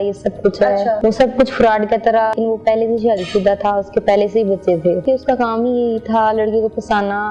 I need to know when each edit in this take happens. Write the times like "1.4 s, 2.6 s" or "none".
1.0 s, 2.3 s, 5.0 s